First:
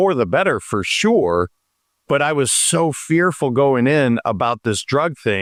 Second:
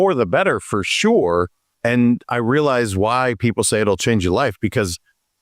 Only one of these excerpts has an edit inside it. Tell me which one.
second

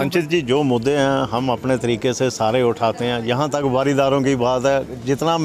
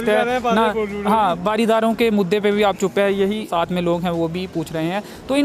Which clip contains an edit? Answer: second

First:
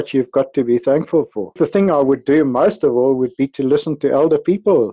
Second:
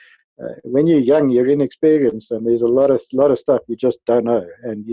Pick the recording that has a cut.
first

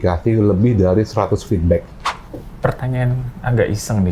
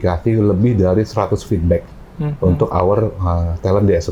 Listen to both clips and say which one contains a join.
first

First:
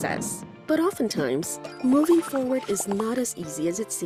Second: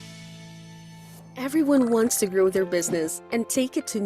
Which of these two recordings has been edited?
second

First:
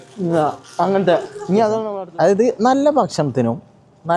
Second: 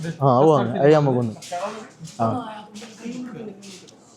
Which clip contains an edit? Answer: first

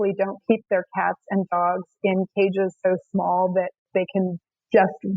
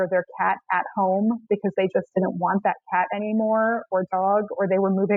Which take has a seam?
first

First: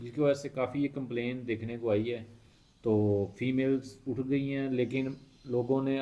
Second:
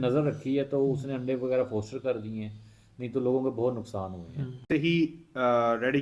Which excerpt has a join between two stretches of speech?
second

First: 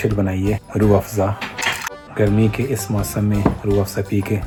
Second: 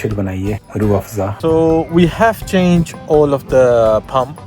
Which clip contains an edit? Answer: second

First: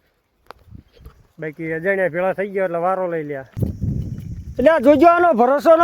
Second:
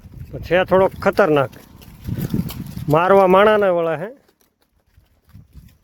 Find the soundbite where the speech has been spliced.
first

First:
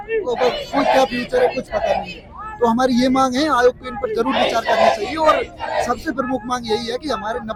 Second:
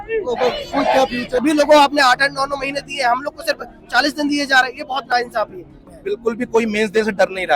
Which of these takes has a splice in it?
second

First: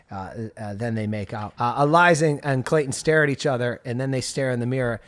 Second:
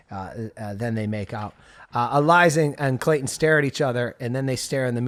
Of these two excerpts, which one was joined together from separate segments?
first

